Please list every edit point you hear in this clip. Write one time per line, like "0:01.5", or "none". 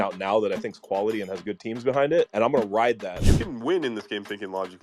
0:03.3